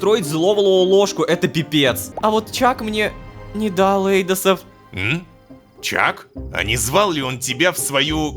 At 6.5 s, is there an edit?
yes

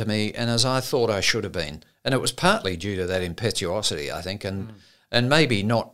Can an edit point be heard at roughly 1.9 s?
no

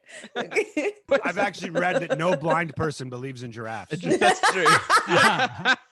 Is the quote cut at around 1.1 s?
yes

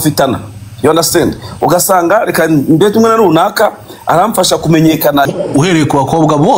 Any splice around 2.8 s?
no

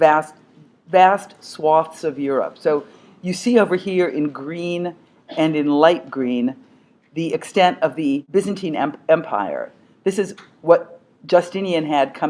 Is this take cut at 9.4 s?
no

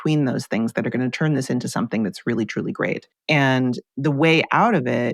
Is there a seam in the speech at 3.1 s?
yes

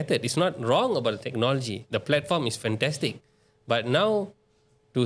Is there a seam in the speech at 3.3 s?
no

